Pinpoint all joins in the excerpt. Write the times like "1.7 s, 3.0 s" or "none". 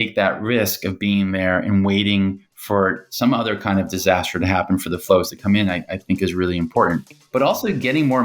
7.1 s